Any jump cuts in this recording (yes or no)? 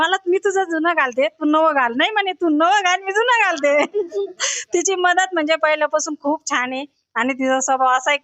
no